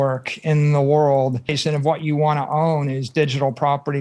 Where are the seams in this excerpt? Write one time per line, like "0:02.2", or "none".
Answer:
0:01.5

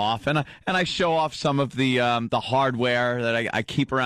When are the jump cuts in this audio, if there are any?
0:01.9

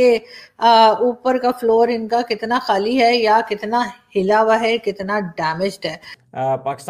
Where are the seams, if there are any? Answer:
none

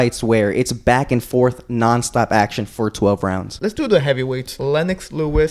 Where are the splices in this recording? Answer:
0:03.7
0:04.5

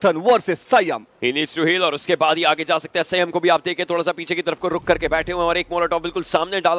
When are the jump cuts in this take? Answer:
none

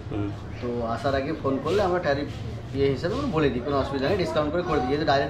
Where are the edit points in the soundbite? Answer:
none

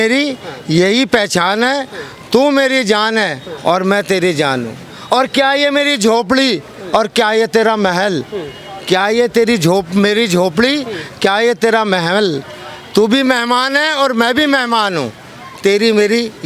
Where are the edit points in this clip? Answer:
none

